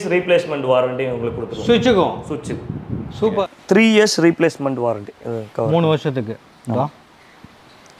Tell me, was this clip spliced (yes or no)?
yes